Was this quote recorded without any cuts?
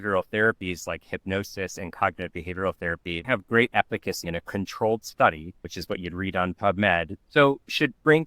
no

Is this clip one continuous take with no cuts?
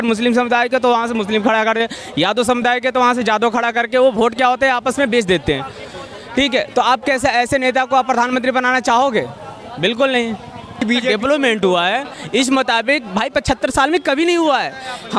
no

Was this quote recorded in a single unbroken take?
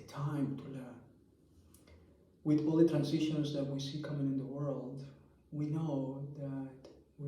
yes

